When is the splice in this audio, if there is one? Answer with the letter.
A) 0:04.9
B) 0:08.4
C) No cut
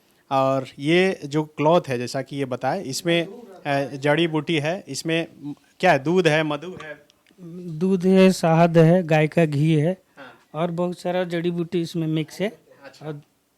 C